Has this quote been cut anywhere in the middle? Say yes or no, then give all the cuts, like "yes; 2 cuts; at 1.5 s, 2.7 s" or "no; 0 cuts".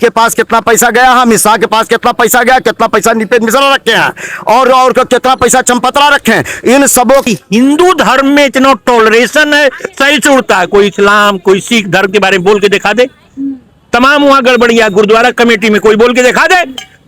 yes; 1 cut; at 7.3 s